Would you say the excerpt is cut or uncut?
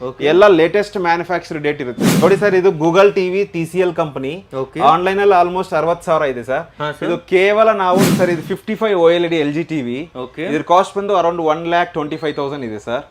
cut